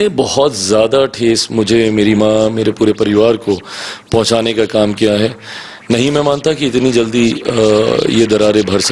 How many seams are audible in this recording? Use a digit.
0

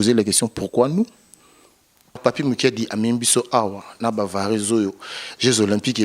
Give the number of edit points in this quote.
1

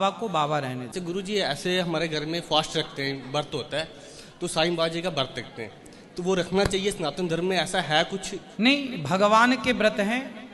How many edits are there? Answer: 1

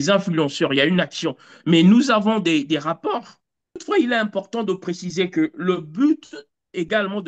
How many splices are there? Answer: 1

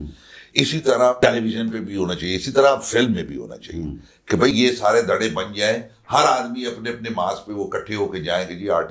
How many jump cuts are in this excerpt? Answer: 0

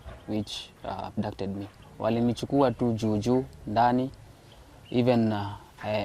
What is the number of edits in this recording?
1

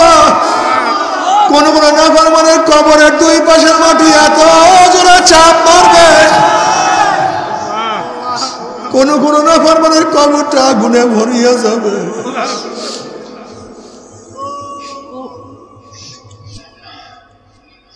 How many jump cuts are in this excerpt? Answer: 1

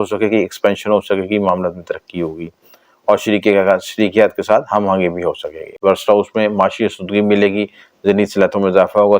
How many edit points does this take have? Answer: 1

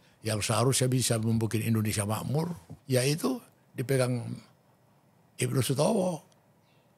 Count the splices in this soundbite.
1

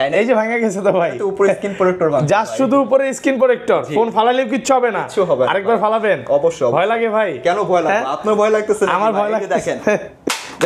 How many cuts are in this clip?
0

